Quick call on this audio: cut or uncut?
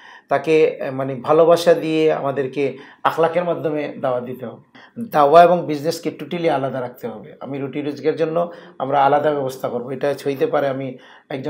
cut